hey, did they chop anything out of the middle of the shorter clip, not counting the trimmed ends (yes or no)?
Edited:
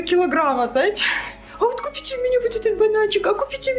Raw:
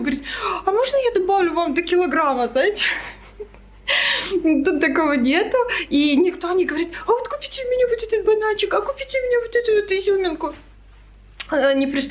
yes